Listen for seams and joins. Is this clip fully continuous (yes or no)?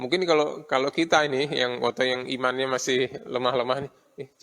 yes